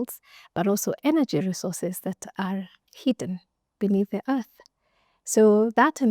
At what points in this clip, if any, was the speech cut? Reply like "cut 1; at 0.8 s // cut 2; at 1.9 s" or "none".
none